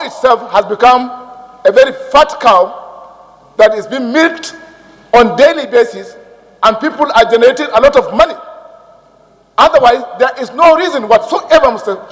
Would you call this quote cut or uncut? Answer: uncut